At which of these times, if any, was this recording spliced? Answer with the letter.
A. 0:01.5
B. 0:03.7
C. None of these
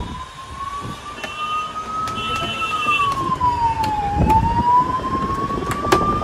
C